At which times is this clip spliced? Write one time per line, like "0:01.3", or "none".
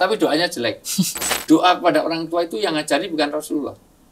0:01.3